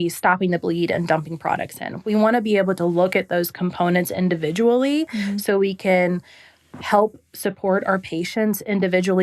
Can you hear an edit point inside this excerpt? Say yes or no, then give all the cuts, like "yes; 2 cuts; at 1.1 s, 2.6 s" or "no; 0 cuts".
no; 0 cuts